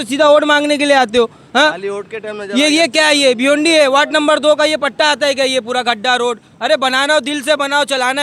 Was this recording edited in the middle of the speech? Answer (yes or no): no